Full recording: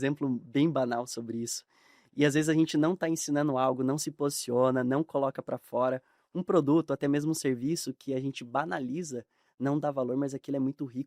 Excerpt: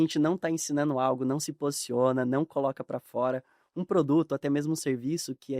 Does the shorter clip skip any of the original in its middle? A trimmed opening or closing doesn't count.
no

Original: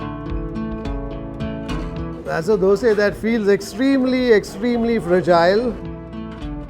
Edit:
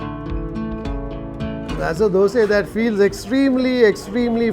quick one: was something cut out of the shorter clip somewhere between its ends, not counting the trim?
yes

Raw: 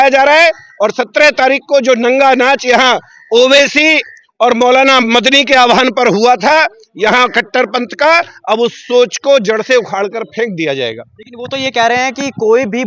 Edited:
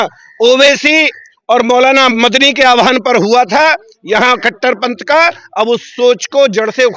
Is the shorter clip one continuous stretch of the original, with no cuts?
yes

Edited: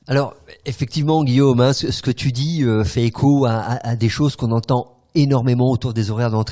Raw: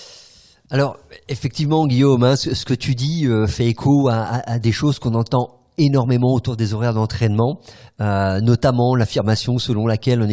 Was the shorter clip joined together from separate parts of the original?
no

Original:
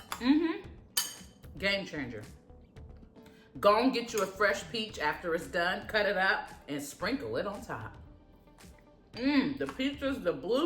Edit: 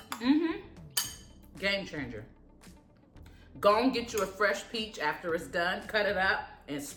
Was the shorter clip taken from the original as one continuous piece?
yes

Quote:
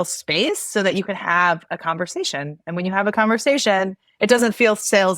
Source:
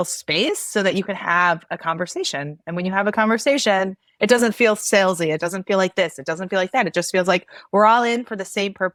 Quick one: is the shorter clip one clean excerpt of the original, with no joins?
yes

